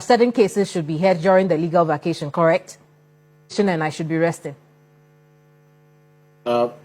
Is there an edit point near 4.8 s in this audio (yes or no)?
no